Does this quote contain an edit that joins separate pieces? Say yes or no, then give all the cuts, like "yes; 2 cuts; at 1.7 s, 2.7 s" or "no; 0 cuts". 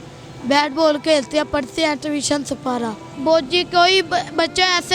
yes; 1 cut; at 3.1 s